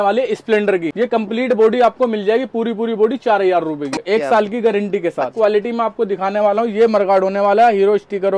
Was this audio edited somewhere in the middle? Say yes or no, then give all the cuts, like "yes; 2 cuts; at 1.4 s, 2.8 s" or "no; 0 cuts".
yes; 3 cuts; at 0.9 s, 3.9 s, 5.3 s